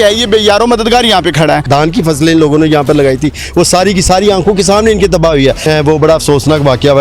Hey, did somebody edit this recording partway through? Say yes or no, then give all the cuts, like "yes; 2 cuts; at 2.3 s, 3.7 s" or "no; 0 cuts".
yes; 2 cuts; at 1.7 s, 5.7 s